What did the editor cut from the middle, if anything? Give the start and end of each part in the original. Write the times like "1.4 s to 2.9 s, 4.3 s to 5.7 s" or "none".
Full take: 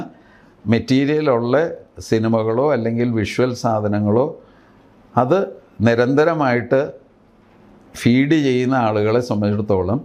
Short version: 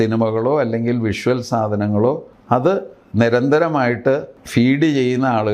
4.4 s to 5.0 s, 7.0 s to 7.8 s